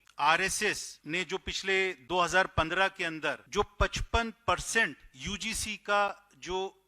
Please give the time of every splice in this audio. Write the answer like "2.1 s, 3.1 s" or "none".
0.9 s, 3.4 s